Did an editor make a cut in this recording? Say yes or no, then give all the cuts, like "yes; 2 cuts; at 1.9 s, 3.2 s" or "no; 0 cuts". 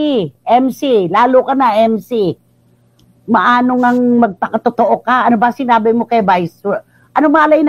no; 0 cuts